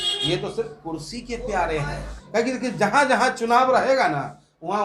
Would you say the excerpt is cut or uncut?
cut